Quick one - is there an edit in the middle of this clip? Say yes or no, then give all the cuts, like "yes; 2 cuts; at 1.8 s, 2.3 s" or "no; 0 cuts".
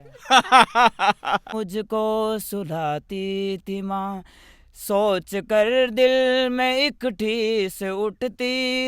yes; 1 cut; at 1.5 s